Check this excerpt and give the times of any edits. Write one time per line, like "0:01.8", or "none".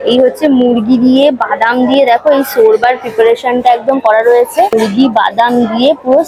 none